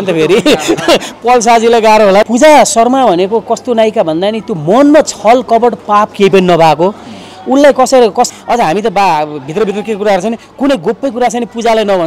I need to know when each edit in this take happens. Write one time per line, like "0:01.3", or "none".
0:02.3
0:08.3